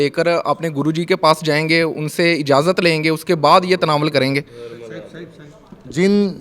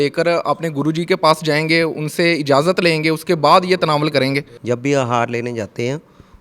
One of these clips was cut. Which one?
second; 1 cut; at 4.5 s

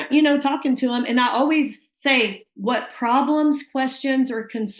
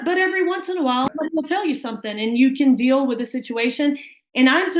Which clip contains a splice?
second; 1 cut; at 1.1 s

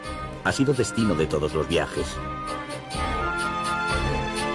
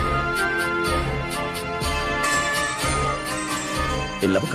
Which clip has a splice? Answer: second; 1 cut; at 0.9 s

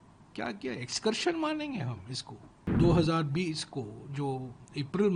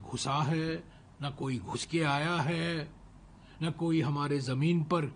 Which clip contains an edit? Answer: first; 1 cut; at 2.7 s

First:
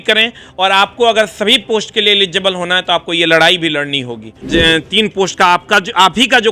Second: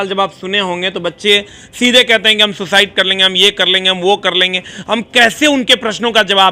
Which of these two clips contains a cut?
first; 1 cut; at 4.3 s

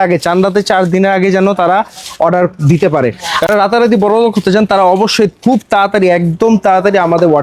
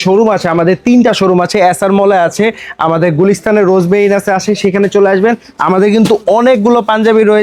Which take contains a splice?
first; 1 cut; at 3.5 s

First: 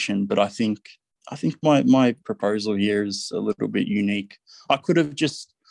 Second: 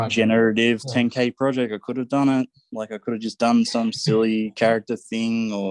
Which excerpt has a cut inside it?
first; 1 cut; at 2.3 s

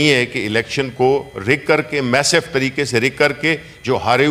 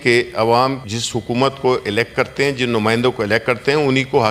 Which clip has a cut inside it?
second; 1 cut; at 0.9 s

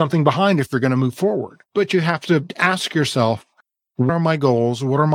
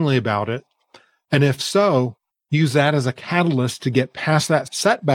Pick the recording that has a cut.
first; 3 cuts; at 1.6 s, 2.5 s, 4.1 s

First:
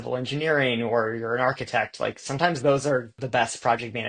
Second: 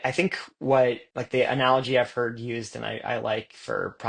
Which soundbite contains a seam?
second; 1 cut; at 1.1 s

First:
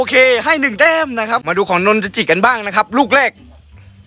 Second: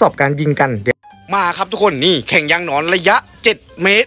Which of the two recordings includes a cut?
first; 1 cut; at 1.4 s

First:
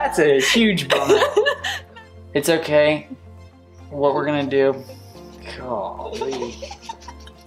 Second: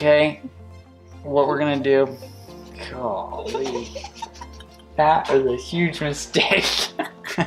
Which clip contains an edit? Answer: first; 1 cut; at 1.7 s

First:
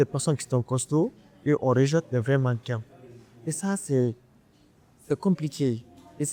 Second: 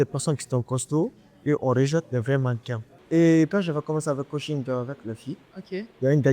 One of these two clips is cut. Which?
second; 1 cut; at 3.0 s

